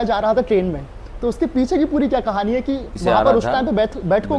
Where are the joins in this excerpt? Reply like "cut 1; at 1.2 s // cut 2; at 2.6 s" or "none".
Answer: cut 1; at 2.9 s